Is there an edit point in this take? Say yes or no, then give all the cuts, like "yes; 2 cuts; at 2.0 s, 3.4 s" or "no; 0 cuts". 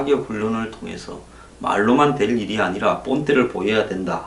no; 0 cuts